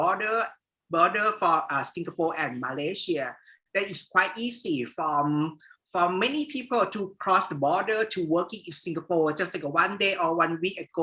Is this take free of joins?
yes; 0 cuts

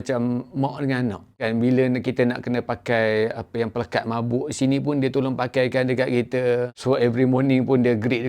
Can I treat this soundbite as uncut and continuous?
no; 1 cut; at 1.3 s

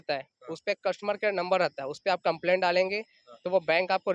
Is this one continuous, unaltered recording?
yes; 0 cuts

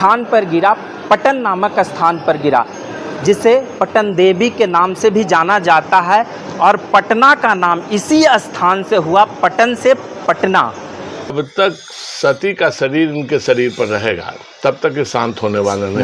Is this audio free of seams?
no; 1 cut; at 11.3 s

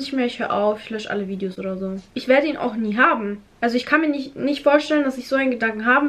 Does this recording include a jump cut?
no; 0 cuts

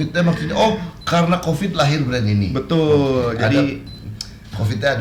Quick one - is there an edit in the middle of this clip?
no; 0 cuts

